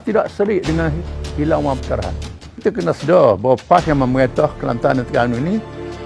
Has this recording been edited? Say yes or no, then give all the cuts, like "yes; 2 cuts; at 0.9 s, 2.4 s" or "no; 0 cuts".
yes; 1 cut; at 2.6 s